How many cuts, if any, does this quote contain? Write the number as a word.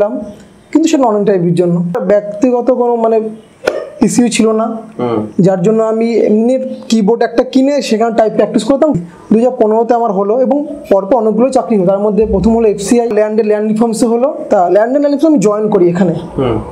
four